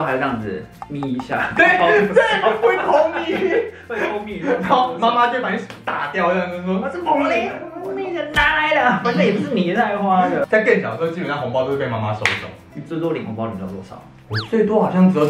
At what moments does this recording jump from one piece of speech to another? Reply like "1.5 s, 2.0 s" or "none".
none

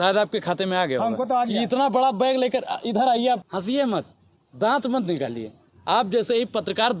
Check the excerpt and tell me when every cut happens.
3.4 s

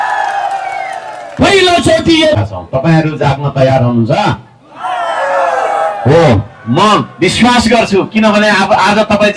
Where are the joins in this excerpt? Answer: 2.4 s

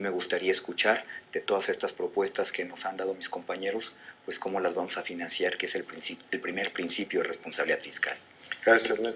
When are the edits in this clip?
none

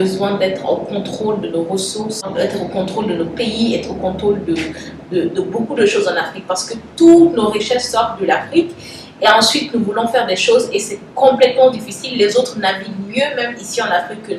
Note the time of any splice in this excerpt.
none

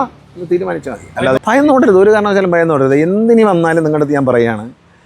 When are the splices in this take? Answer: 1.4 s

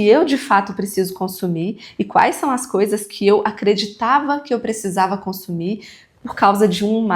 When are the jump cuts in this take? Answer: none

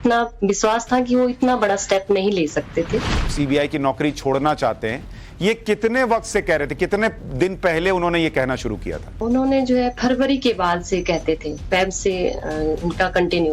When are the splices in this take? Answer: 3.3 s, 9.1 s

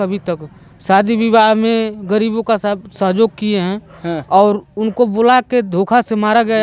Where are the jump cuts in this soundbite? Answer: none

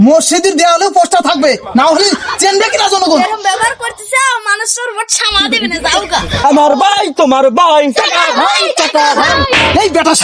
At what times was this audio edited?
3.2 s, 6.3 s

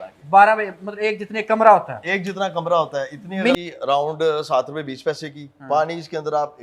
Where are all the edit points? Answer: 3.5 s

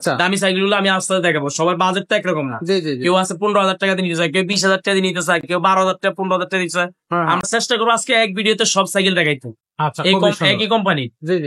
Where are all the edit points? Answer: none

